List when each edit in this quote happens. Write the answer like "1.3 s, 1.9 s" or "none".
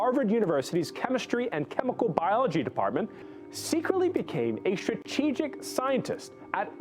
3.2 s